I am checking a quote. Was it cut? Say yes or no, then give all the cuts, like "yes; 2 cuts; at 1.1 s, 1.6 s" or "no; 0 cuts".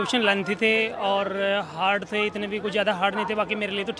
no; 0 cuts